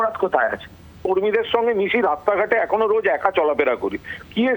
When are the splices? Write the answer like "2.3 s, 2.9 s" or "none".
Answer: 1.0 s